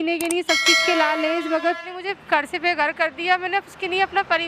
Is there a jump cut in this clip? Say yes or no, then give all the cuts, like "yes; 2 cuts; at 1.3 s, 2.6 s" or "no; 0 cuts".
yes; 1 cut; at 1.9 s